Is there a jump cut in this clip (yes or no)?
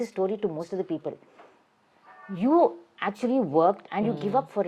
no